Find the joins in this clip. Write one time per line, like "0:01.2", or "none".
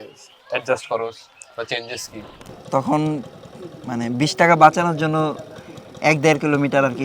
0:02.5